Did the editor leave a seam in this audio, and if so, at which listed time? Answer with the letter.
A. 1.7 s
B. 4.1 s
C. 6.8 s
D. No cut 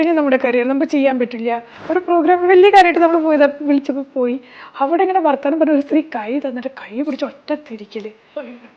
A